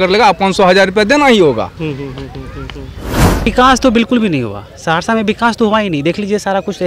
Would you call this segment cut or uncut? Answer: cut